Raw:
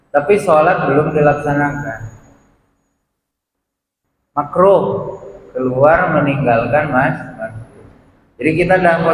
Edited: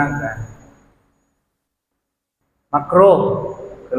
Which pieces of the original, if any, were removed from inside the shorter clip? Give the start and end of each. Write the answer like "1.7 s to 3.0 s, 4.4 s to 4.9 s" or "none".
none